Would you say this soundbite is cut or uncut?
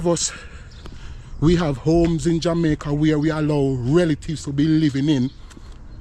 uncut